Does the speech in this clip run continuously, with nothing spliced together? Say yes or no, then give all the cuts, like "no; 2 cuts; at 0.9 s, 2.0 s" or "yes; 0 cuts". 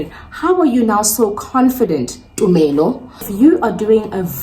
no; 1 cut; at 3.3 s